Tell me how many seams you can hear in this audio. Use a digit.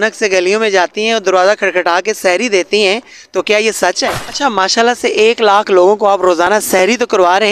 1